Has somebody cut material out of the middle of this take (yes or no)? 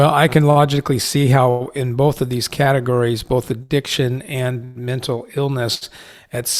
no